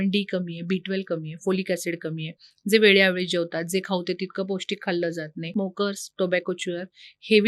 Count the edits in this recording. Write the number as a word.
one